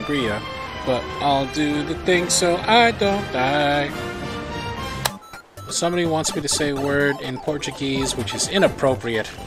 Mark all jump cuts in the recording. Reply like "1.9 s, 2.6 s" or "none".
none